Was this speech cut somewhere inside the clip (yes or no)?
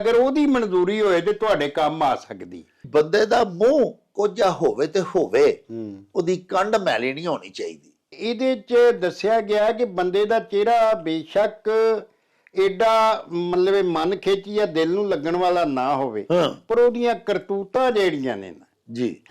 yes